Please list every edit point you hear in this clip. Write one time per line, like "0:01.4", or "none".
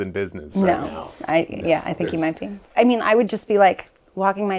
0:02.6